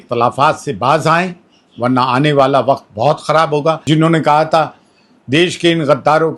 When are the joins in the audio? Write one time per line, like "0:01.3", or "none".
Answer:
0:03.8